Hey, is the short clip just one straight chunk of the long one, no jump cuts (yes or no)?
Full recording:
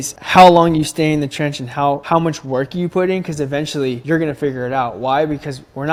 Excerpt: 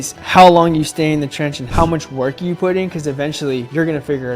no